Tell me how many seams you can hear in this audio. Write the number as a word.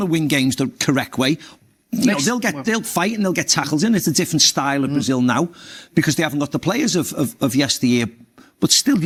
zero